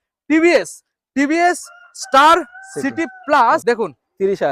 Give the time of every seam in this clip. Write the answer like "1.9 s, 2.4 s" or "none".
3.6 s